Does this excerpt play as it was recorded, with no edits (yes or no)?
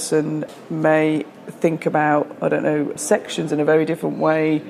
no